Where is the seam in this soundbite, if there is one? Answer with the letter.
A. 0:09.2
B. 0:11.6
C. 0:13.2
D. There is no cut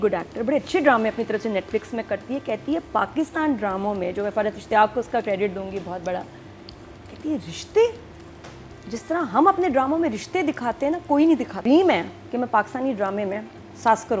B